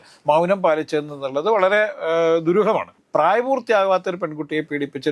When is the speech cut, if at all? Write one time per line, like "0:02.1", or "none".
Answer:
0:03.0